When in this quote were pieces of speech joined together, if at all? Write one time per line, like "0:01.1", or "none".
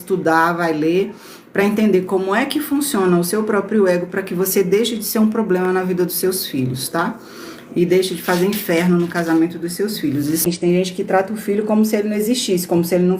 0:10.4